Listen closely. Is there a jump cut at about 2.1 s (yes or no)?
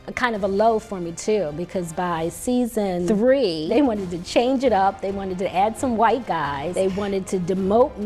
no